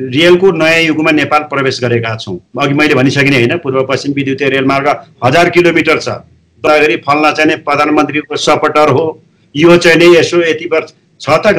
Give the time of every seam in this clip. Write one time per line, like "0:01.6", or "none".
0:06.7